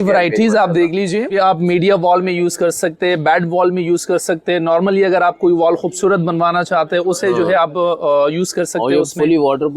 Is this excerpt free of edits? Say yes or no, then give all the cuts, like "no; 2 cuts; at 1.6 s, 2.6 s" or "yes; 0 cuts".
no; 1 cut; at 1.3 s